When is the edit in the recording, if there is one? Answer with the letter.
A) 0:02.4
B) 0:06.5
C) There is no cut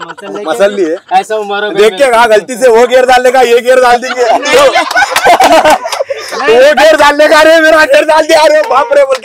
C